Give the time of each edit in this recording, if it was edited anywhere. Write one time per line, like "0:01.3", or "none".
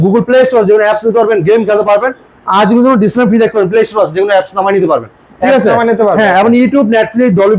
none